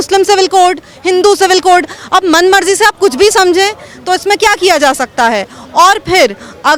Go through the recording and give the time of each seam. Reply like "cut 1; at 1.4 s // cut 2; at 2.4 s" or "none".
none